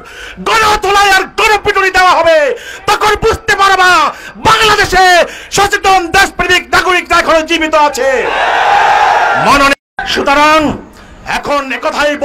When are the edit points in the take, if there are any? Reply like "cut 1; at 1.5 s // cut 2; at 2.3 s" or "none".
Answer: cut 1; at 9.8 s